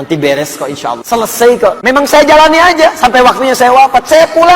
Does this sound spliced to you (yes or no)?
yes